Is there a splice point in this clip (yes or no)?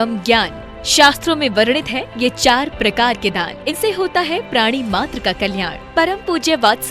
yes